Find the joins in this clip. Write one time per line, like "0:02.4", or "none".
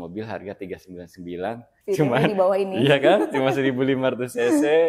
0:01.7